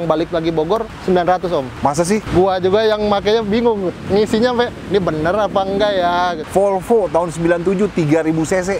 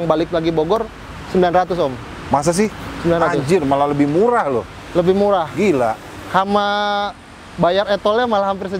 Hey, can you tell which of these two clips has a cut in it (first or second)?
first